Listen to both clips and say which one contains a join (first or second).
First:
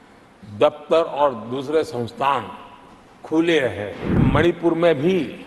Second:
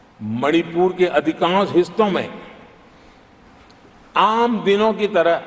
first